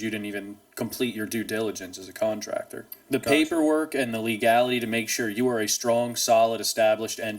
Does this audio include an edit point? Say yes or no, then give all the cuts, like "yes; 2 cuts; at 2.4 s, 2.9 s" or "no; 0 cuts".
yes; 1 cut; at 3.0 s